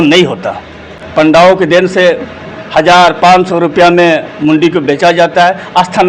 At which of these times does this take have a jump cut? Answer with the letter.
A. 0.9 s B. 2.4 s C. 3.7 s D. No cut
A